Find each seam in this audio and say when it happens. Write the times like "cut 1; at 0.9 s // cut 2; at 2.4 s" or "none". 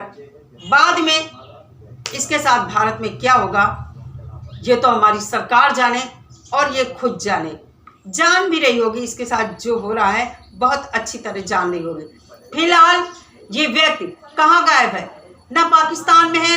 cut 1; at 14.2 s